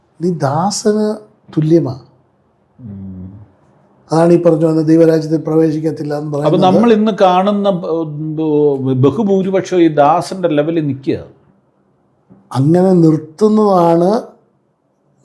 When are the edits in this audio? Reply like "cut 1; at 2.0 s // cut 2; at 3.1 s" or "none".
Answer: none